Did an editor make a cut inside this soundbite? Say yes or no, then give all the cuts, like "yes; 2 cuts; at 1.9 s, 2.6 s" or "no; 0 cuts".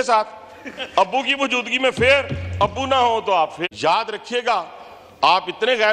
no; 0 cuts